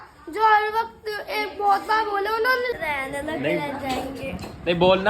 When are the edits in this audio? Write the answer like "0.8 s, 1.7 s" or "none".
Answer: 2.7 s